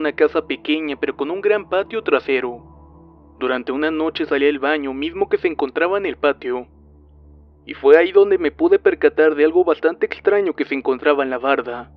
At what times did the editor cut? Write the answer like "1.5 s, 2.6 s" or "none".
none